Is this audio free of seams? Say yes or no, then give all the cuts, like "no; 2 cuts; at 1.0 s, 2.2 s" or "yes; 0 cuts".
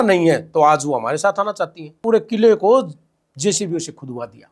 no; 1 cut; at 2.0 s